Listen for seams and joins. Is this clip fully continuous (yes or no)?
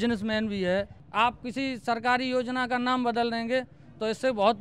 no